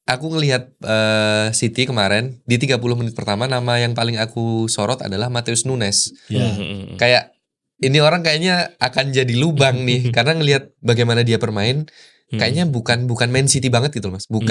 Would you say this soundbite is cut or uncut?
uncut